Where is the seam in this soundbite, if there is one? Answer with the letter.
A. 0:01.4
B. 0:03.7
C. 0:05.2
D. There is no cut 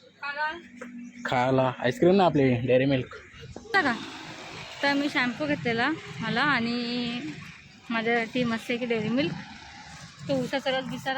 B